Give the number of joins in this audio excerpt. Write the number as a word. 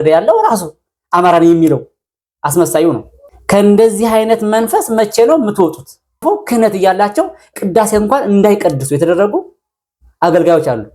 one